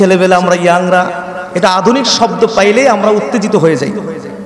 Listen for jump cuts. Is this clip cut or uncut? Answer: uncut